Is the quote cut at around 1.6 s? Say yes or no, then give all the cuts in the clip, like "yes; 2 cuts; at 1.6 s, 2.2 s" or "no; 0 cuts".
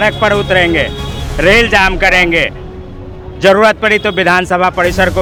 no; 0 cuts